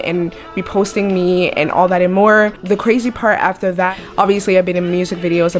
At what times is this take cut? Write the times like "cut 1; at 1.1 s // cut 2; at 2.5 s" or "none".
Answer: cut 1; at 3.9 s